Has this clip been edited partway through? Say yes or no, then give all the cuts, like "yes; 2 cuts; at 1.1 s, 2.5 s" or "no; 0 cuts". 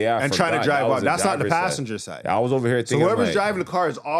no; 0 cuts